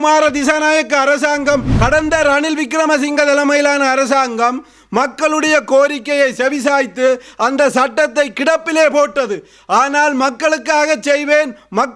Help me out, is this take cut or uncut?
cut